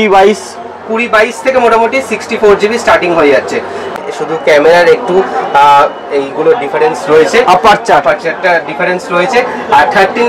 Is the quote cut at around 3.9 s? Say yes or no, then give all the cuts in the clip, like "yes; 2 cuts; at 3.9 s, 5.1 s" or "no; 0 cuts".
yes; 1 cut; at 3.9 s